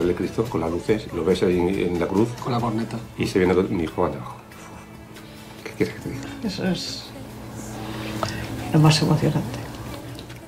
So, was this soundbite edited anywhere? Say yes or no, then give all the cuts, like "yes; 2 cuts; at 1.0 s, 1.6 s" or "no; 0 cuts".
no; 0 cuts